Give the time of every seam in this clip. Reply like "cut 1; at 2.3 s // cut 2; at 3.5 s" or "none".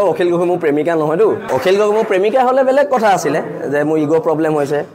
cut 1; at 1.4 s

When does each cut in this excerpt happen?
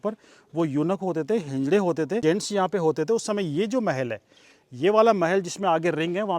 cut 1; at 2.2 s

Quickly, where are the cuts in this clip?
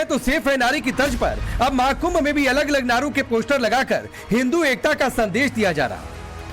cut 1; at 3.4 s

